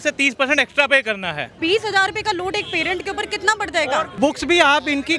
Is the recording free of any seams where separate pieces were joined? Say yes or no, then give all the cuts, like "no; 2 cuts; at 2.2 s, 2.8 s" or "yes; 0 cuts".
no; 2 cuts; at 1.6 s, 4.2 s